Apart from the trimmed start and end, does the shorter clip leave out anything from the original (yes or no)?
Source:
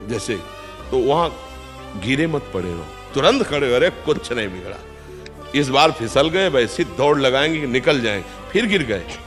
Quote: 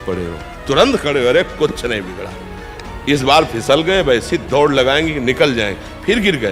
no